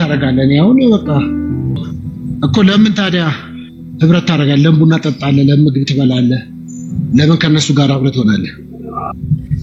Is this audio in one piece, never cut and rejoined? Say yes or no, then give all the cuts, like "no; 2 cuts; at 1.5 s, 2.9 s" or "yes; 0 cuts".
no; 1 cut; at 1.7 s